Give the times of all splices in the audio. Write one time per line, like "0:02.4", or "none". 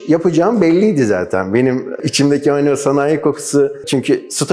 none